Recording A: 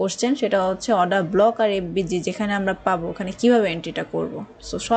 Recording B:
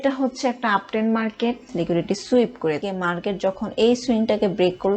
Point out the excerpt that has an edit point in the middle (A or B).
B